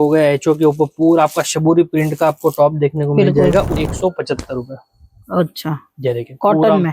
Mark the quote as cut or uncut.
cut